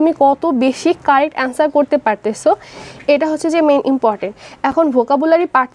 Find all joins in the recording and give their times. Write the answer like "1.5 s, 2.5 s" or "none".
none